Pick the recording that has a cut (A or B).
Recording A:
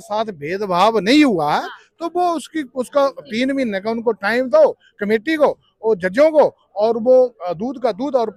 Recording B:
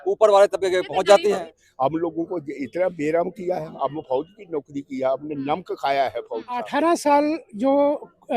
B